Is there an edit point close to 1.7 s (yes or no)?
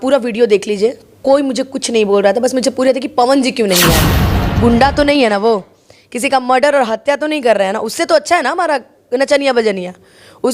no